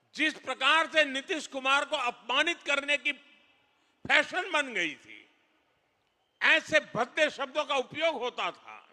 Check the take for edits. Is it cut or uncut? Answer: uncut